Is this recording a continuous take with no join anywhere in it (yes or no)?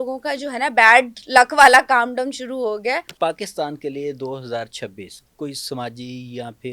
no